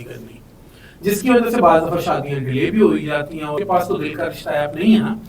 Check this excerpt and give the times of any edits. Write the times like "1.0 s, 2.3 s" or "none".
3.5 s